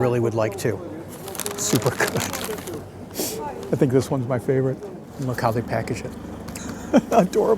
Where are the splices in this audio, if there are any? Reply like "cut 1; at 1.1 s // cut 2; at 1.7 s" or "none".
cut 1; at 5.1 s